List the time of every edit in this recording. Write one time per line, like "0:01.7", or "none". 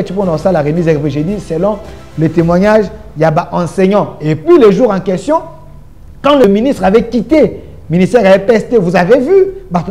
0:06.4